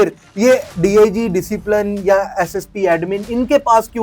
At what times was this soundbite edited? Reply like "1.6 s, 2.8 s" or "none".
none